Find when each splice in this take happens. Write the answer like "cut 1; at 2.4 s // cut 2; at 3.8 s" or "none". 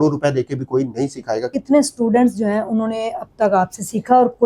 cut 1; at 1.5 s